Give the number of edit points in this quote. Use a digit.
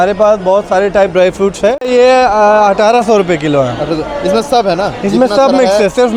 1